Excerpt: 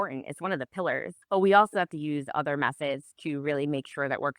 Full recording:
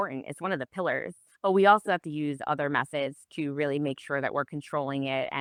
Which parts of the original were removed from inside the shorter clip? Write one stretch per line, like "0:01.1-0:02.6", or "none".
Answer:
0:01.1-0:01.3